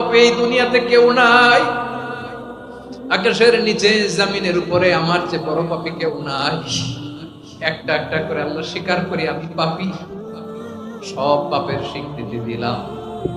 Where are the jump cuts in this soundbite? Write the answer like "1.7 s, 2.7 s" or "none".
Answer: none